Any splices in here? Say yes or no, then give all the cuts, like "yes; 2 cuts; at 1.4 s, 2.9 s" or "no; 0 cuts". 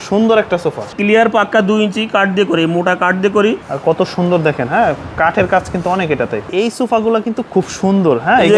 yes; 3 cuts; at 0.9 s, 3.7 s, 6.5 s